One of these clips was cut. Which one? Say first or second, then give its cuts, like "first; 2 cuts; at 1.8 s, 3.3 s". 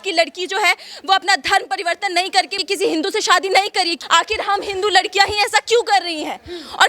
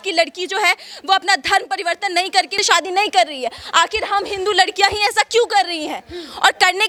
first; 2 cuts; at 2.6 s, 3.9 s